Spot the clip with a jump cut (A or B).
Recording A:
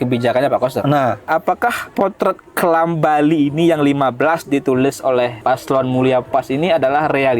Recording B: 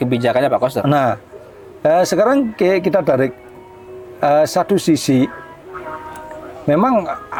A